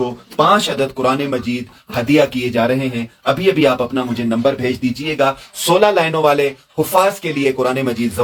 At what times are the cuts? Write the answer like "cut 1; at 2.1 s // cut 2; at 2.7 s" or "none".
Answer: none

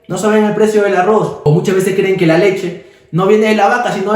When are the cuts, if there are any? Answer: cut 1; at 1.4 s

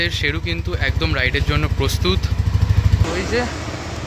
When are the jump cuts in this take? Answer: cut 1; at 3.0 s

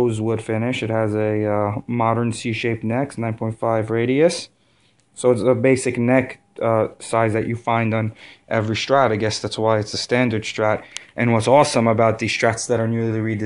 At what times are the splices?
cut 1; at 5.0 s

